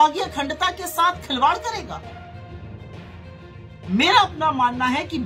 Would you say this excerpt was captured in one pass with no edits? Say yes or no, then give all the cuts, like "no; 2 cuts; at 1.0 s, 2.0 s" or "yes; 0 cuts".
no; 2 cuts; at 2.2 s, 3.9 s